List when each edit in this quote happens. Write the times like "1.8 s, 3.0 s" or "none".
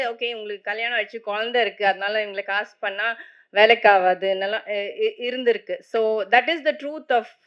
none